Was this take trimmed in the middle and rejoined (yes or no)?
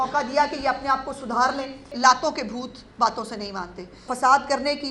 yes